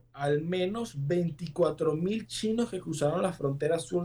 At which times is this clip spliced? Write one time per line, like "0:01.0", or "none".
none